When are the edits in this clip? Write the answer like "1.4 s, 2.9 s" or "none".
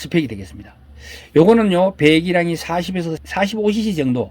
3.2 s